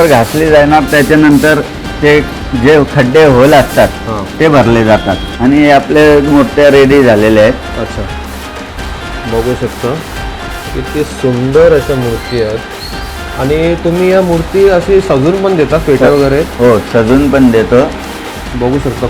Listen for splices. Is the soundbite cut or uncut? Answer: cut